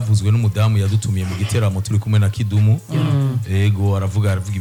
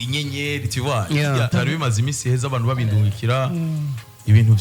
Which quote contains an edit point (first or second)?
second